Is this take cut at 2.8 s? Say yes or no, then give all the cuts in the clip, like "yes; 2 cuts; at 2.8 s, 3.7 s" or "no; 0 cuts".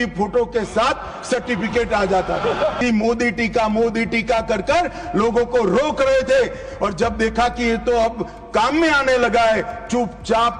yes; 1 cut; at 2.8 s